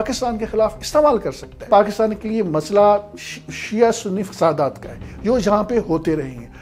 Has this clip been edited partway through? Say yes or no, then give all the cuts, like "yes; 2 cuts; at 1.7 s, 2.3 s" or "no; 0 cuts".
yes; 1 cut; at 1.7 s